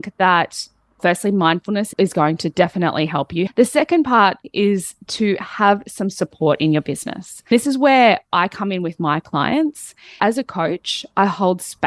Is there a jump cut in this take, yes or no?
yes